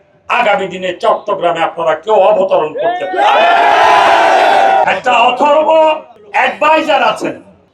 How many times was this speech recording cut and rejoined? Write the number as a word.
one